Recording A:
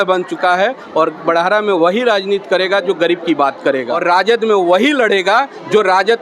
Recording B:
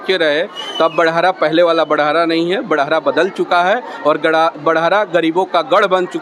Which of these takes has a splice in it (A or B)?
A